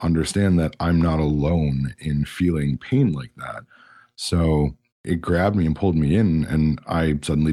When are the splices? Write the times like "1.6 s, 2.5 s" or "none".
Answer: 5.1 s